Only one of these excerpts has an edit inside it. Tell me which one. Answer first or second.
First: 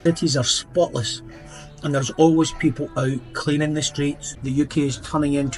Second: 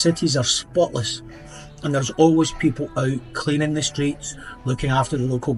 first